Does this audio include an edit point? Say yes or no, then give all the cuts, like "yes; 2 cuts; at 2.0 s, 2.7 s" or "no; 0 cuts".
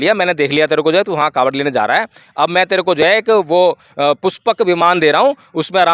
no; 0 cuts